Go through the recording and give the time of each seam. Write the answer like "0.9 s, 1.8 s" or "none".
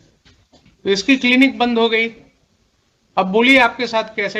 1.0 s, 3.3 s